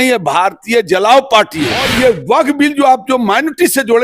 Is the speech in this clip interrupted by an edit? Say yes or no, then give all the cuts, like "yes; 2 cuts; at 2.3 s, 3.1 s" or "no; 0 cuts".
yes; 1 cut; at 1.9 s